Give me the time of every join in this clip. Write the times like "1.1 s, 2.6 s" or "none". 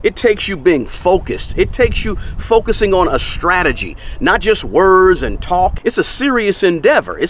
5.8 s